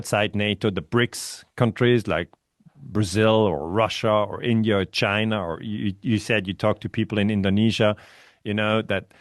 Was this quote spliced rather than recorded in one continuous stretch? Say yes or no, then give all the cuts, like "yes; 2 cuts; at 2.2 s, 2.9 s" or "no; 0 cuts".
no; 0 cuts